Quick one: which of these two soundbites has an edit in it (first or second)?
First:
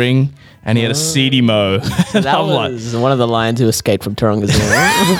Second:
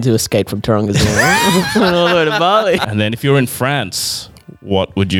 second